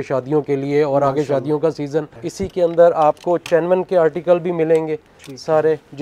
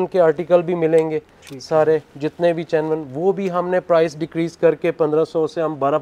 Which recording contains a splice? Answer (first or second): first